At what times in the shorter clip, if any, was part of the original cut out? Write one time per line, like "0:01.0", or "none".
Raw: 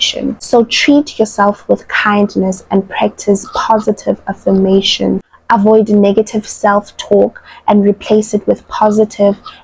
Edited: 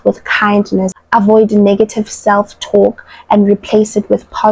0:01.0